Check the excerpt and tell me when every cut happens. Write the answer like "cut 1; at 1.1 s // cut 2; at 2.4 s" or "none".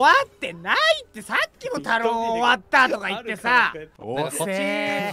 cut 1; at 3.9 s